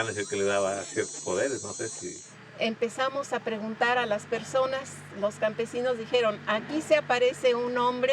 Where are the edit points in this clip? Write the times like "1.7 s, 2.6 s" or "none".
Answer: 1.9 s